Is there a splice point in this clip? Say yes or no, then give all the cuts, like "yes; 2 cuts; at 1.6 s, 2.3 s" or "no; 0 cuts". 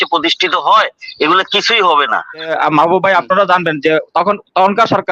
yes; 1 cut; at 2.5 s